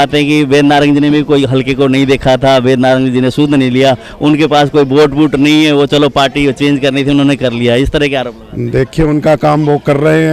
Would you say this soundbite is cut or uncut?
uncut